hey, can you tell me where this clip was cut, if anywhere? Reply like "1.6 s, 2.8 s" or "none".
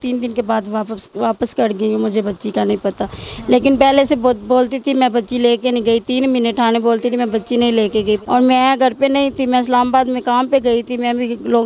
8.2 s

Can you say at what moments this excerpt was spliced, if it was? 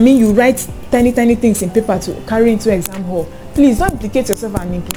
none

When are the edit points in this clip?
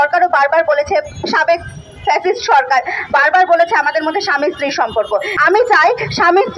5.3 s

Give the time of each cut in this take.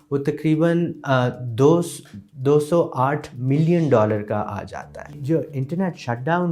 5.1 s

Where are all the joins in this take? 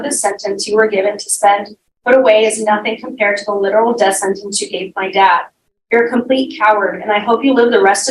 1.3 s

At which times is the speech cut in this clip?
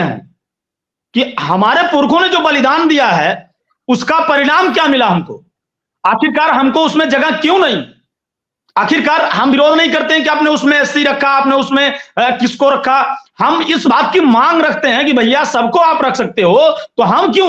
none

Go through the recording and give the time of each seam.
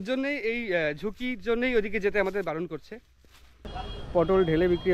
3.6 s

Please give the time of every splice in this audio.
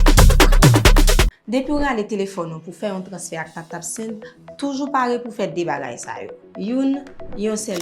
1.0 s

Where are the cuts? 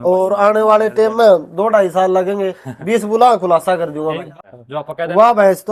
4.3 s

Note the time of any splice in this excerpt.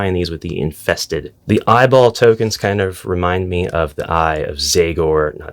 1.3 s

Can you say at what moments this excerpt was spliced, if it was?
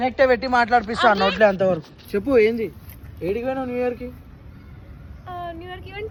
none

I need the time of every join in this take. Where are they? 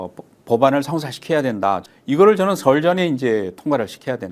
1.8 s

